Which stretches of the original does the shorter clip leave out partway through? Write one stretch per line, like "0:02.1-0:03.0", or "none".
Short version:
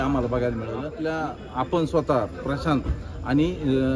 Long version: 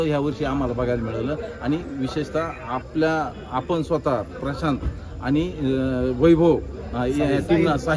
0:01.4-0:02.9